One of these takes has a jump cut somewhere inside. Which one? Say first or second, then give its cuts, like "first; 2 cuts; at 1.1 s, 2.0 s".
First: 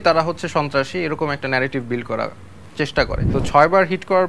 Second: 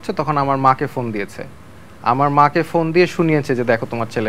first; 1 cut; at 3.2 s